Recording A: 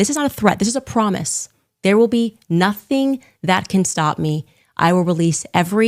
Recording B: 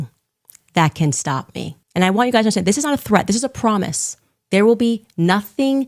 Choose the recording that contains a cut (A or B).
B